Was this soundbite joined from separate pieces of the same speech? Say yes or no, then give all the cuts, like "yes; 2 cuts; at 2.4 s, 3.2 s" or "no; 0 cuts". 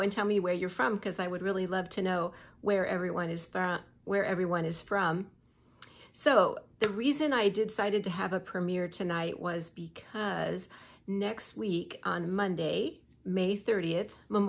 no; 0 cuts